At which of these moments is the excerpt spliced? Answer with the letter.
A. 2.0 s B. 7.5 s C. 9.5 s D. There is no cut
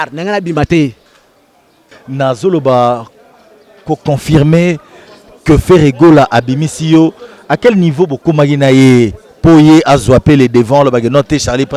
D